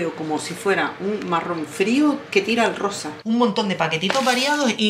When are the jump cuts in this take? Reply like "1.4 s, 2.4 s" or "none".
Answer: 3.1 s